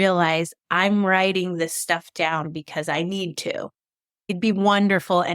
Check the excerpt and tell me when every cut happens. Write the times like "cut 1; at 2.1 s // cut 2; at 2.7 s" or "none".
cut 1; at 4.3 s